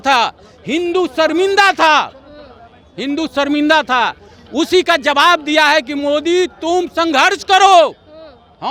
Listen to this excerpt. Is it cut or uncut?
uncut